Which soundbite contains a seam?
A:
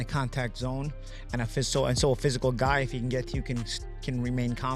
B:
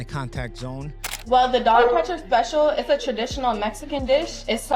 B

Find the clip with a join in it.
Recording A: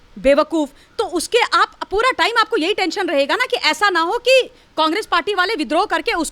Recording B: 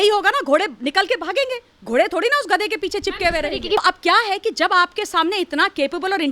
B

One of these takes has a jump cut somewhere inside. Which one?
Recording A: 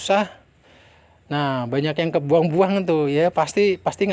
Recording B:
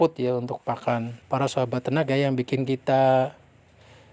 B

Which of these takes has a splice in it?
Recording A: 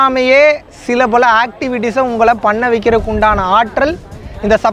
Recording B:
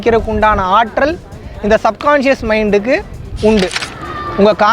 B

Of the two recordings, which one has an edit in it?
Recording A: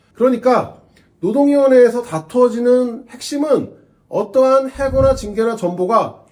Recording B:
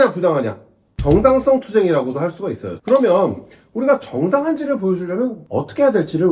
B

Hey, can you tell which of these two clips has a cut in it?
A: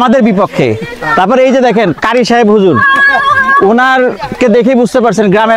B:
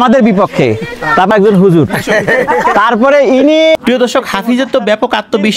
B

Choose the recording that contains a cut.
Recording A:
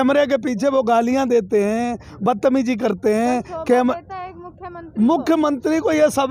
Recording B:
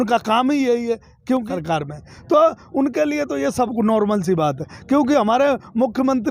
B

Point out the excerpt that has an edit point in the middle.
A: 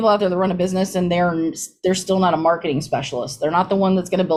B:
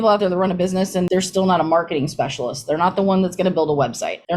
B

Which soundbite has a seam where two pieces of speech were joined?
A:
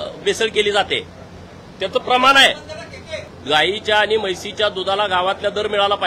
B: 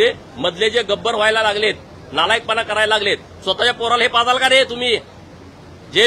A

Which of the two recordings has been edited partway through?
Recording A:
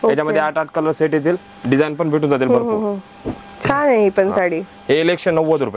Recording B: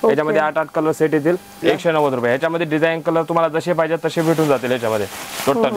B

